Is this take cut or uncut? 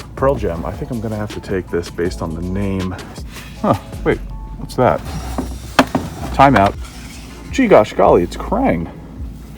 cut